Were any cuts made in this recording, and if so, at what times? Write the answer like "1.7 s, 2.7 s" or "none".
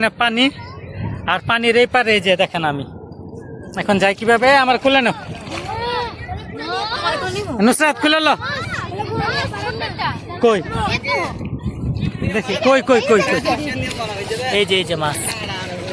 none